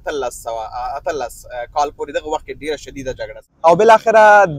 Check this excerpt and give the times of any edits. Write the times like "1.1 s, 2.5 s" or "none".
3.4 s